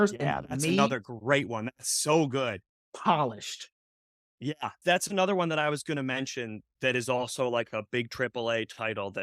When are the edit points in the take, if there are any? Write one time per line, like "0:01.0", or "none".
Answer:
0:04.8